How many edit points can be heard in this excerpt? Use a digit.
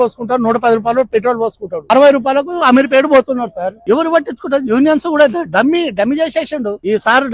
1